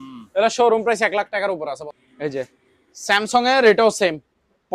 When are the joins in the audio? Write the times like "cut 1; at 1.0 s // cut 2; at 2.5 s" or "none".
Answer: cut 1; at 1.9 s